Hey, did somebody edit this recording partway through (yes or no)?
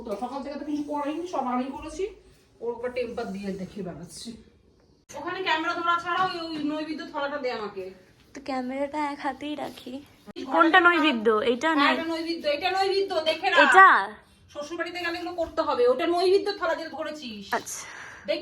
yes